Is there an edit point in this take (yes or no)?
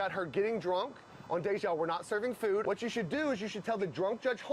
yes